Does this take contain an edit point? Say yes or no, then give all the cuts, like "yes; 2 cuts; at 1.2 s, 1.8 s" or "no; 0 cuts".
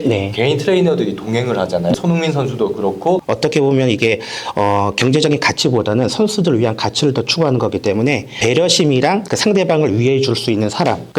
yes; 2 cuts; at 3.2 s, 8.3 s